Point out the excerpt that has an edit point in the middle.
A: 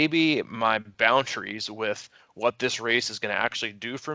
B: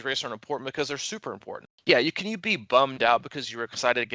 B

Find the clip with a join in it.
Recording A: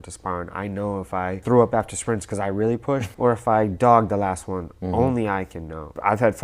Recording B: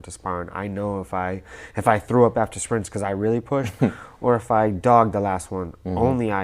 A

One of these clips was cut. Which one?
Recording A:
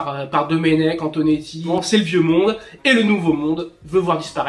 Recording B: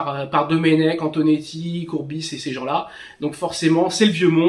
A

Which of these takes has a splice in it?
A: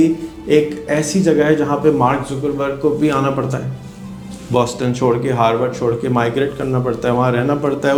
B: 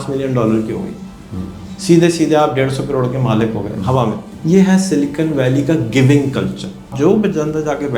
B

